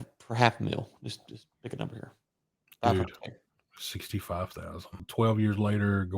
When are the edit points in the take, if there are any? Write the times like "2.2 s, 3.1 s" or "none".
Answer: 5.0 s